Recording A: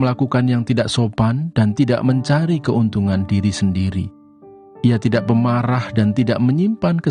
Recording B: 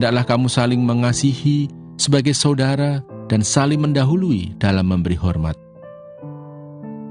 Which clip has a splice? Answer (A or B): B